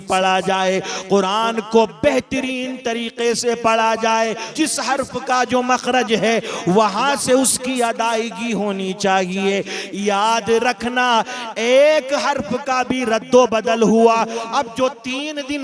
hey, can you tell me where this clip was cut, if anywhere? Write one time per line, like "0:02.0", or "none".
0:04.4